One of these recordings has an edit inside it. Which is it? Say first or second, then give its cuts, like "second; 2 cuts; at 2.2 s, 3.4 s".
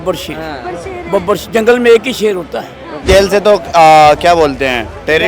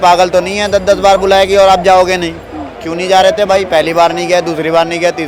first; 1 cut; at 3.0 s